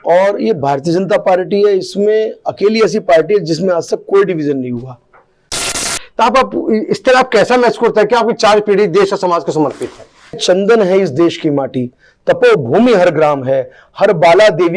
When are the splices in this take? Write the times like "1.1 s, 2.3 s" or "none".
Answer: 5.8 s, 10.4 s